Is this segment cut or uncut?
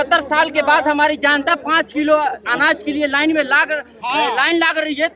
uncut